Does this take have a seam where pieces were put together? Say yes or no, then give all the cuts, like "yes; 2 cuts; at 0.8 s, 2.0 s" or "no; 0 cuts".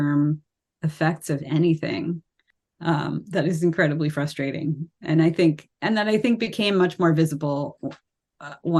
no; 0 cuts